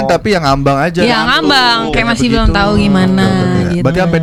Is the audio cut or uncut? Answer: uncut